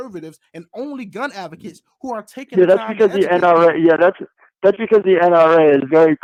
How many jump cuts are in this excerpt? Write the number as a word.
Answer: zero